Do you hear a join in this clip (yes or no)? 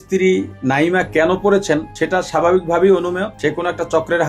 yes